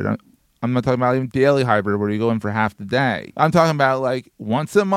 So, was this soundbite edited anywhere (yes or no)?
yes